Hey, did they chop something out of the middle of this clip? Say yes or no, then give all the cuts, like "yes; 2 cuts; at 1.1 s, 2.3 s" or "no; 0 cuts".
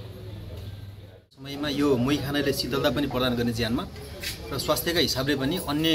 yes; 1 cut; at 1.4 s